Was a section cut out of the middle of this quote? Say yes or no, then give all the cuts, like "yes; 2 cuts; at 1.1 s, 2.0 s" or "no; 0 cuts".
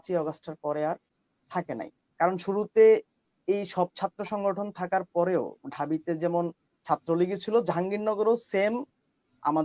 no; 0 cuts